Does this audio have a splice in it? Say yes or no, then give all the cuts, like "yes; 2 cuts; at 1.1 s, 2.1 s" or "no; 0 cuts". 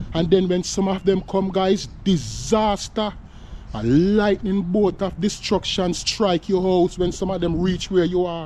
no; 0 cuts